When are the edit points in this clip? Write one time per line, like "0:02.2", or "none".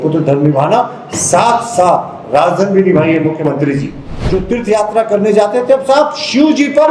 0:04.2